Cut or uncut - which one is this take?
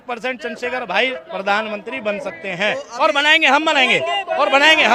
uncut